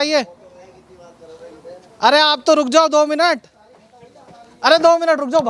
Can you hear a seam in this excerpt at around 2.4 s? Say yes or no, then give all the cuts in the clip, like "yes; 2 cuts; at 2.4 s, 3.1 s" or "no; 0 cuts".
no; 0 cuts